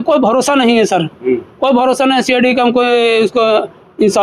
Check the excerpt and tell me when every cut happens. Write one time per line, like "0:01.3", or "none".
none